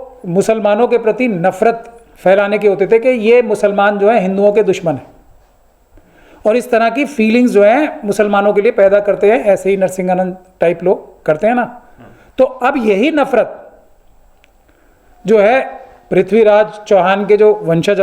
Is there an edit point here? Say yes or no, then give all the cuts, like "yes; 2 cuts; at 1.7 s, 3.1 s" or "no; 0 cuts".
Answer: no; 0 cuts